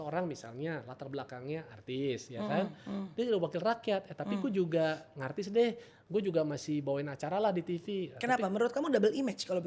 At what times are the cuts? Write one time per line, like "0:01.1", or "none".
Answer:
none